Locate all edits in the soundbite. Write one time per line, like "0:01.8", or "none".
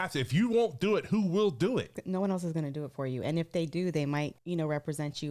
0:02.0
0:04.4